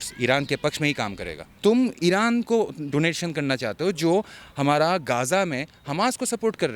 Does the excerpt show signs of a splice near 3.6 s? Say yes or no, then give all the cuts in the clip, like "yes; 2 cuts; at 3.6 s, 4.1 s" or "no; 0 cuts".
no; 1 cut; at 1.4 s